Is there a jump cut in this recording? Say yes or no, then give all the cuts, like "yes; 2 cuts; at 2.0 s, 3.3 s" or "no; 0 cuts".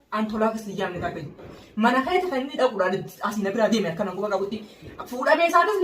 yes; 1 cut; at 1.5 s